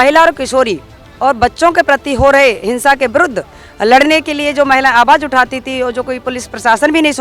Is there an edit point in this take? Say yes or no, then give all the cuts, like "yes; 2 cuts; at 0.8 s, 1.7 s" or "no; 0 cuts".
no; 0 cuts